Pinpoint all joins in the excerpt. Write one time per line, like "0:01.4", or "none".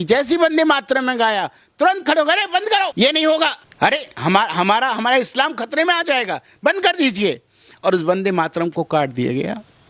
0:02.9
0:03.6